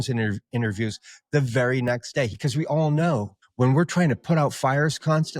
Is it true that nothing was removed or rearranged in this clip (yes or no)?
no